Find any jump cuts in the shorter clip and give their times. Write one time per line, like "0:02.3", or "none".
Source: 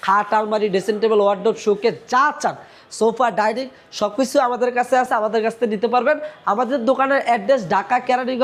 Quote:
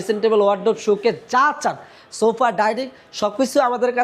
none